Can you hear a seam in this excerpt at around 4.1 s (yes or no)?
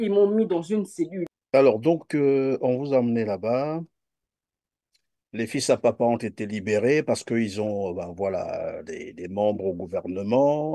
no